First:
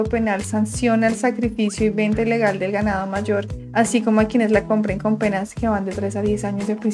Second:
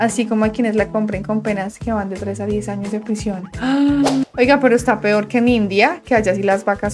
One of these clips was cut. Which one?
second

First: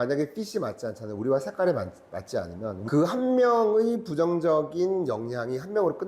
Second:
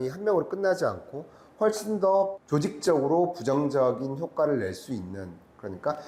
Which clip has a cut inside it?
first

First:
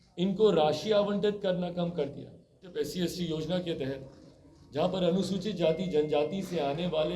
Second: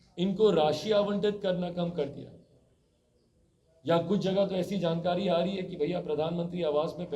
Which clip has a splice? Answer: first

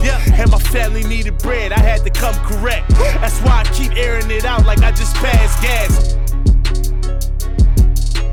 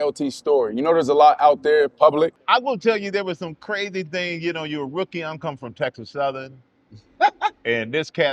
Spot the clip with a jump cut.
second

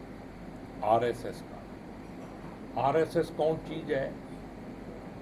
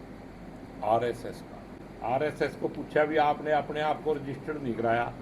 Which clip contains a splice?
second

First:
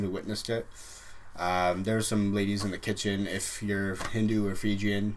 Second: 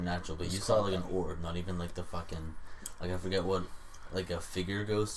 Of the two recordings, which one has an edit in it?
first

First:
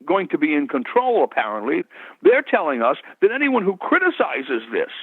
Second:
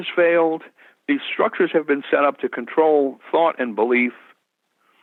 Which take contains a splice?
first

